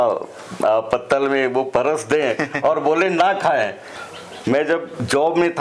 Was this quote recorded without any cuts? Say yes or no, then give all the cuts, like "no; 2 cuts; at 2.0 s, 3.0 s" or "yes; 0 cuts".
no; 1 cut; at 3.8 s